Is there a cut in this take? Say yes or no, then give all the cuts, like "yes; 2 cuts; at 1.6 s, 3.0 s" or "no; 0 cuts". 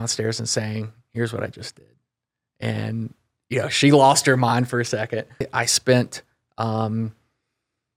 yes; 1 cut; at 5.5 s